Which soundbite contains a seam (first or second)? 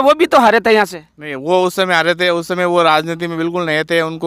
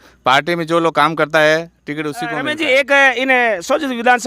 second